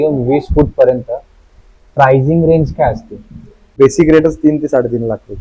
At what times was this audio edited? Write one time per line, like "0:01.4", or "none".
0:03.7